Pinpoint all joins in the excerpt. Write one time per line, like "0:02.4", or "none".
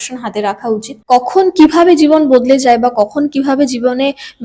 0:01.0